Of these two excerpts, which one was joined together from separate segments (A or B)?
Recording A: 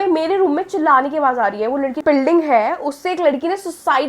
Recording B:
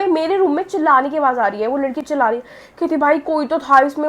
A